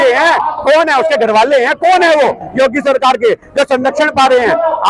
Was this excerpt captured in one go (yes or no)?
yes